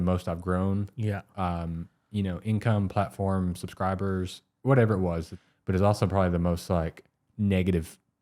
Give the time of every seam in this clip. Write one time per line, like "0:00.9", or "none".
0:05.3
0:07.2